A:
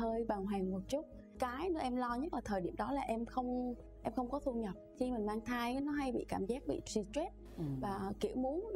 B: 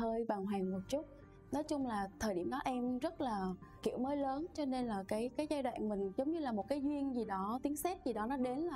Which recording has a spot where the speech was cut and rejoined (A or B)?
A